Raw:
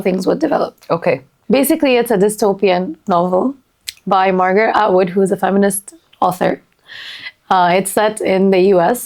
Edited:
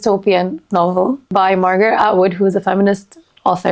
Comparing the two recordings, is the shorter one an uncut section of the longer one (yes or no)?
no